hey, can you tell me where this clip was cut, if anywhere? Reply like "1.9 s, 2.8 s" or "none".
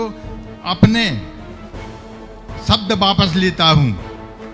1.2 s, 2.6 s